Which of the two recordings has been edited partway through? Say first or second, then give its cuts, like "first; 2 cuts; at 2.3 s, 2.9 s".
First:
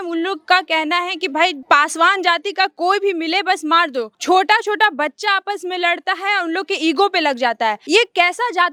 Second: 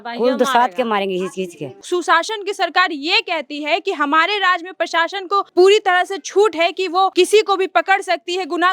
second; 3 cuts; at 1.8 s, 5.5 s, 7.1 s